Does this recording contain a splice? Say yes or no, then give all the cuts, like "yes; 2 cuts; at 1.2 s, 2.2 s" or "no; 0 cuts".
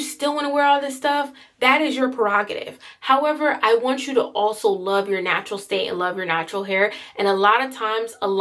no; 0 cuts